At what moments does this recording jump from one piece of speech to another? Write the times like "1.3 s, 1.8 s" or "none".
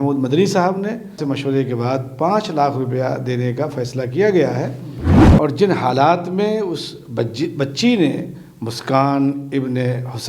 1.2 s, 5.2 s